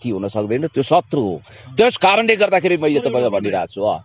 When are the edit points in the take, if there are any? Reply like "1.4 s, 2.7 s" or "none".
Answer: none